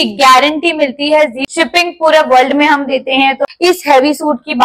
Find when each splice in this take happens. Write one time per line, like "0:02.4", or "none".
0:01.4
0:03.4